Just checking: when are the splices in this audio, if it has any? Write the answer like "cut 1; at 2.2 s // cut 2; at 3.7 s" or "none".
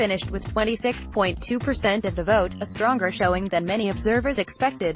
none